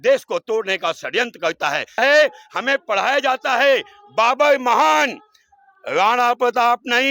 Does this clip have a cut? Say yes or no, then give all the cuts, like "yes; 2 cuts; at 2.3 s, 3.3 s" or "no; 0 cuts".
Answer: yes; 1 cut; at 2.0 s